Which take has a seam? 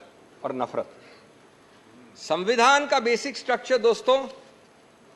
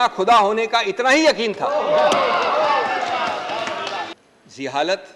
second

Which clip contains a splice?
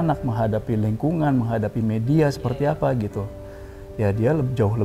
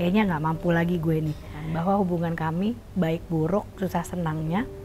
second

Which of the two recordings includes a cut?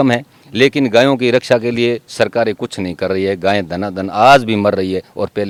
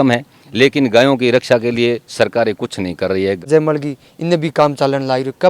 second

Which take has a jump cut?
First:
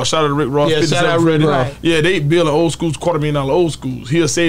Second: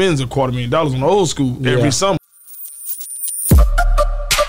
second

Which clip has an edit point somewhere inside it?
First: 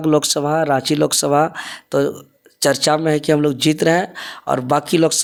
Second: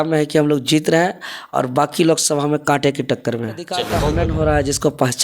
second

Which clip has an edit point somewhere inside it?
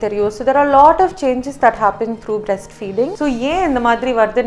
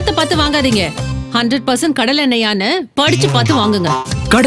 first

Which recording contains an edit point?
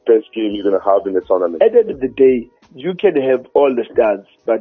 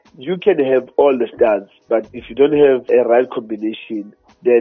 first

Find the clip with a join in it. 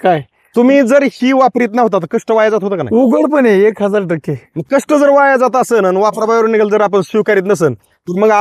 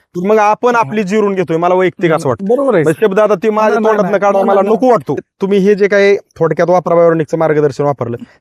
second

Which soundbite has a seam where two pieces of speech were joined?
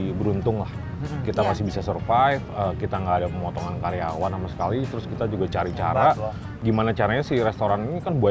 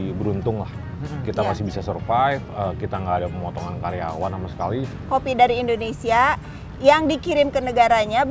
second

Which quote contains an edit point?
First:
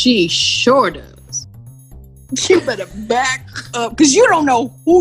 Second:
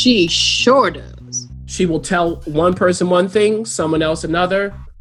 first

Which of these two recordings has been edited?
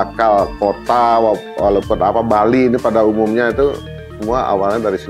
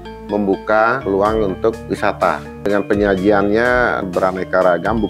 second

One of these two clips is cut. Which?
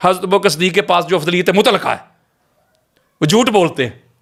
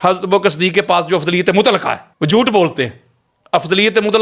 second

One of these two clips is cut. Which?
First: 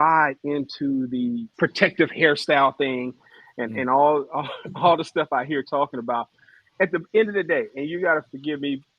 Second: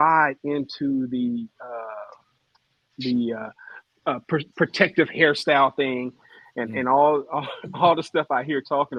first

